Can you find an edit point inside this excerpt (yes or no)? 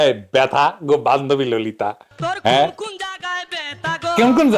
no